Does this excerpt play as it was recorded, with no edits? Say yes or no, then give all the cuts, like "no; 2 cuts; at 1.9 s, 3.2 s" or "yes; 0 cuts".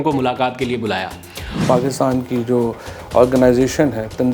no; 1 cut; at 1.6 s